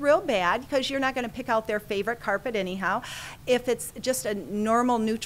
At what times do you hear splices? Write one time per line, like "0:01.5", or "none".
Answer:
none